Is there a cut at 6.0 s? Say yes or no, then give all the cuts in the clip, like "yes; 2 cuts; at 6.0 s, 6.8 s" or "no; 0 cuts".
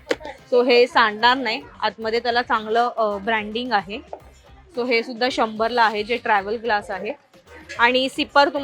no; 0 cuts